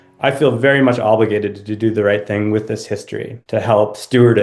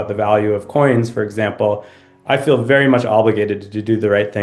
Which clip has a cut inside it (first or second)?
first